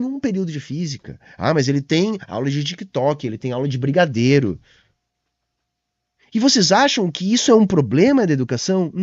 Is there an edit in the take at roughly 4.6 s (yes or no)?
no